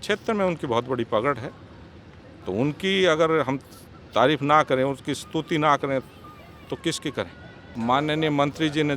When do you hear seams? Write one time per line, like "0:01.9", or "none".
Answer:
0:07.7